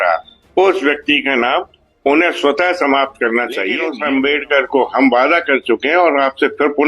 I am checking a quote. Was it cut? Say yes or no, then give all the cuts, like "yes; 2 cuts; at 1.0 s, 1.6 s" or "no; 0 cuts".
yes; 1 cut; at 3.9 s